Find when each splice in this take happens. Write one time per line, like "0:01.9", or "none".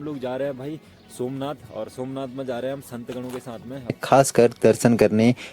0:04.0